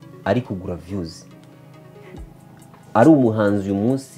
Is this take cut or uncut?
uncut